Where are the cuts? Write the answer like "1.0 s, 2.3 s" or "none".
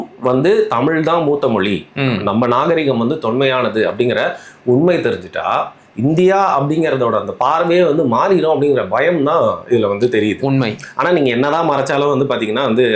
none

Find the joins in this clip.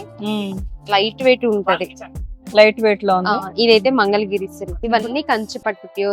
4.7 s

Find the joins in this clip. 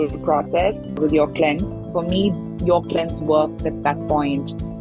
1.8 s

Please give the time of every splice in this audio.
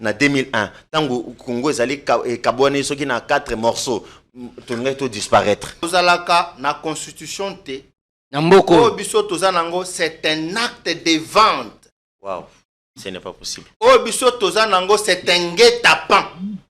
5.9 s

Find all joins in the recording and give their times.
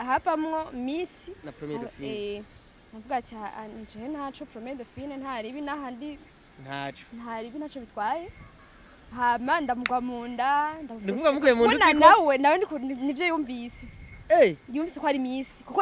none

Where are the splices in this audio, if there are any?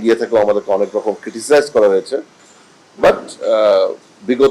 none

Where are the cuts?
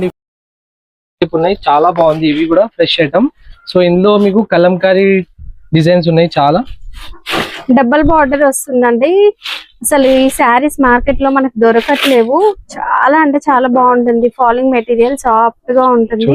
none

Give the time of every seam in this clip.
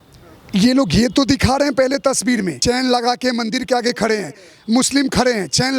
2.6 s

